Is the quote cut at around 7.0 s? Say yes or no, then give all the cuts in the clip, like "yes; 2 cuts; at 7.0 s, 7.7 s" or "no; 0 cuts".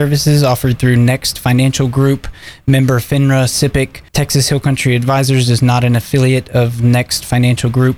no; 1 cut; at 4.0 s